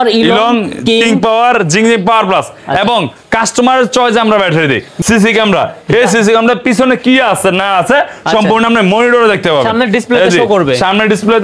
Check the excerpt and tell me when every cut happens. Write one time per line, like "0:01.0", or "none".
0:04.9

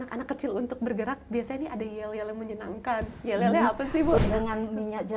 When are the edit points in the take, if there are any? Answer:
0:04.2

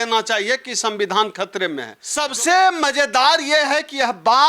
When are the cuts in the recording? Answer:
0:02.0

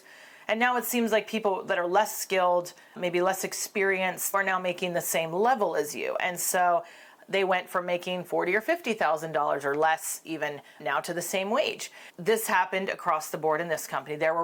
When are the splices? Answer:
none

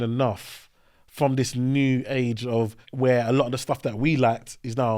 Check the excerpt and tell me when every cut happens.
0:02.8

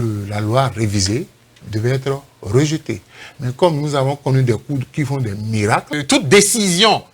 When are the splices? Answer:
0:05.9

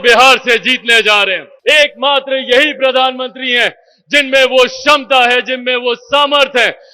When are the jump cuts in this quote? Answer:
0:01.5

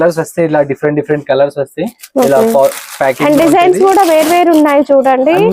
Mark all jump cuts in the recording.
none

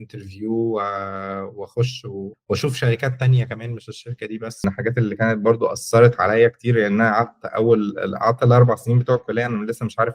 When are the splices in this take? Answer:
0:04.6

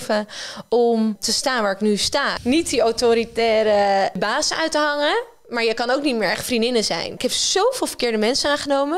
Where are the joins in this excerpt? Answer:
0:01.3
0:02.3
0:04.2
0:07.2

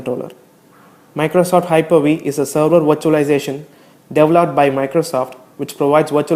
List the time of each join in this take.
0:01.1

